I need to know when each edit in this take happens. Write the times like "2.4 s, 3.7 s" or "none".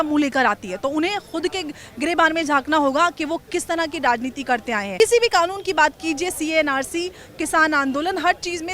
5.0 s